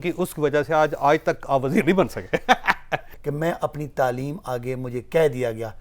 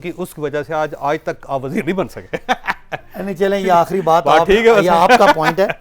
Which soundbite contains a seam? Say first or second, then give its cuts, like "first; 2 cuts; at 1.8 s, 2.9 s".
first; 1 cut; at 3.1 s